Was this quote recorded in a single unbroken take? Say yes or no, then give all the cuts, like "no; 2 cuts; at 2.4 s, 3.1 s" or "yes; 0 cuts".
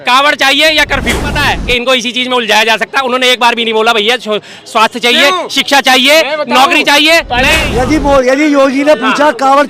no; 2 cuts; at 1.4 s, 7.6 s